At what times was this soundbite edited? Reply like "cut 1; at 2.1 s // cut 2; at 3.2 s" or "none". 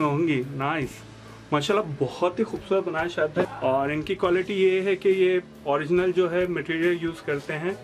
cut 1; at 3.4 s